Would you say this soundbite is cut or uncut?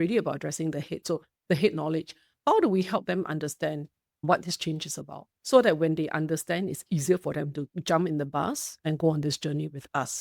cut